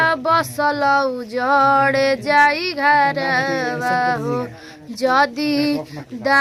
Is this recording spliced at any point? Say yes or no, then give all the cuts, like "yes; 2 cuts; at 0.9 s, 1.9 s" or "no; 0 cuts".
no; 0 cuts